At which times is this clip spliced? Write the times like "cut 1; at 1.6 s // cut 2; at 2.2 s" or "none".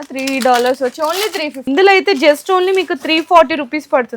cut 1; at 1.5 s